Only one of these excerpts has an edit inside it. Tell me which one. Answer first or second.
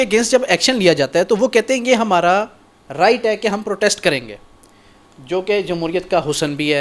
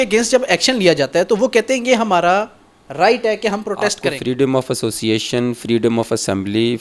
second